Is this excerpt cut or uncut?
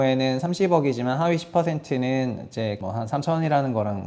cut